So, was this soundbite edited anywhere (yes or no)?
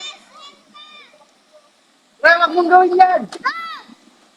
no